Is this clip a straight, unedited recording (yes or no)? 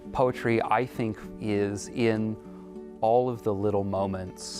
no